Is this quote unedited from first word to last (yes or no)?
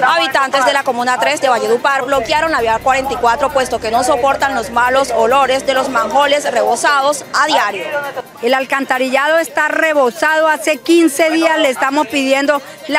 no